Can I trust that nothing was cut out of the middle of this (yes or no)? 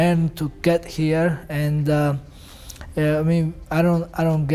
yes